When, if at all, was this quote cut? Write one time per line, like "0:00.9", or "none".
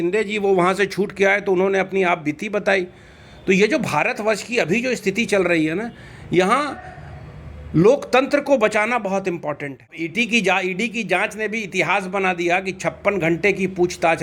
0:10.0

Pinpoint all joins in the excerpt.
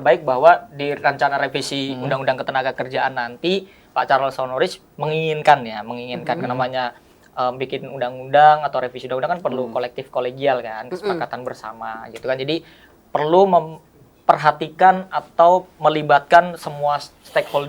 none

